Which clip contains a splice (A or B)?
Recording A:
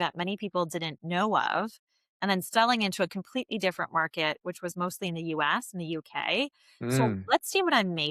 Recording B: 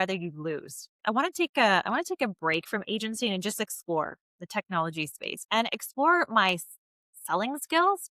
B